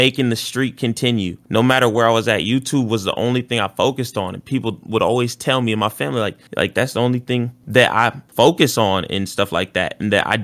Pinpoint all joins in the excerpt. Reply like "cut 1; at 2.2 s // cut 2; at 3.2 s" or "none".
none